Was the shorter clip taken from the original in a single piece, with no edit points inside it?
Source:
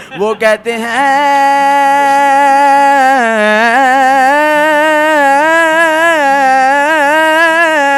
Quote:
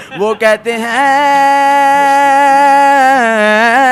yes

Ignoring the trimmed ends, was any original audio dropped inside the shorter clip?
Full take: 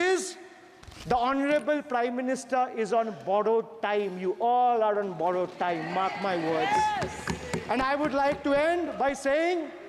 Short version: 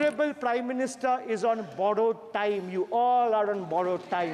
no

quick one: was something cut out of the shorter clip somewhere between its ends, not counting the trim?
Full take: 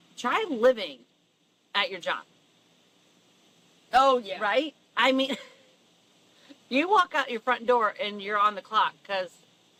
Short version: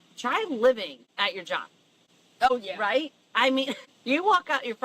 yes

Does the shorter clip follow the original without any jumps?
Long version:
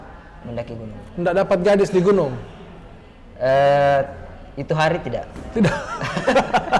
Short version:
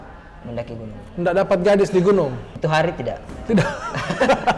no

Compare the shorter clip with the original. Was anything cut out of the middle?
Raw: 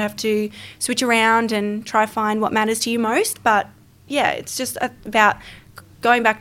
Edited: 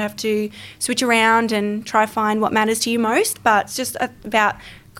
yes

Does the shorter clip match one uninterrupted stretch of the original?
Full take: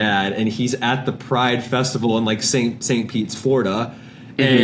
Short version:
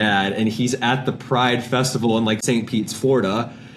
no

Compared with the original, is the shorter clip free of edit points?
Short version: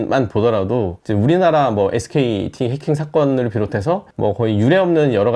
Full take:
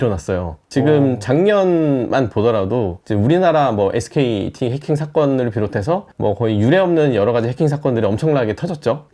yes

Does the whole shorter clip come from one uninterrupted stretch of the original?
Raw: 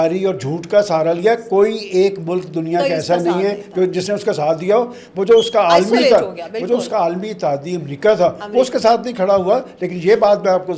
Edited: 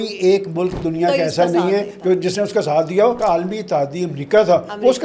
no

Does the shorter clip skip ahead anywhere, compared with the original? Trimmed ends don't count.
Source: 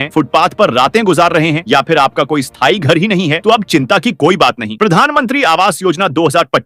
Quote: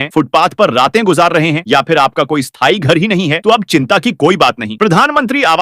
no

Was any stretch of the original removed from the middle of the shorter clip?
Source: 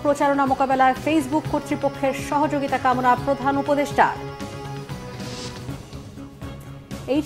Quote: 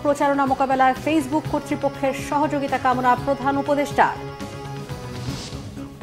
yes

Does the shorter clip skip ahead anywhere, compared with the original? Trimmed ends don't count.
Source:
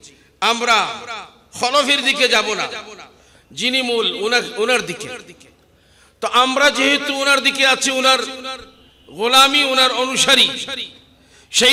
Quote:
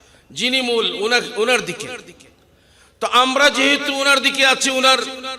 no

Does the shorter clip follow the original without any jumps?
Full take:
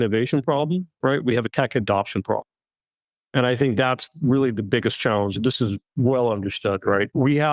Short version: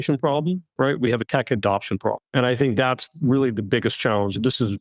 no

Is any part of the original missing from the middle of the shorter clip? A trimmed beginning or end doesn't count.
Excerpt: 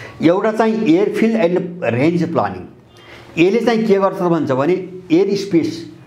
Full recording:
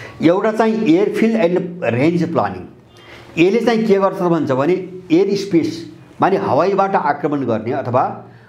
no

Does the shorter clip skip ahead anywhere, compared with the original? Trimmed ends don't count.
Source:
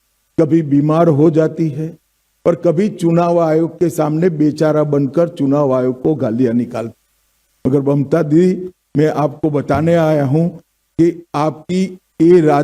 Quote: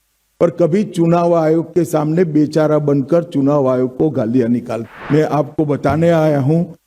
yes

